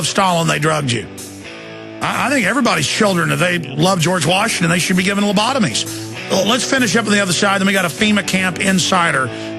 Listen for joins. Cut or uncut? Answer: cut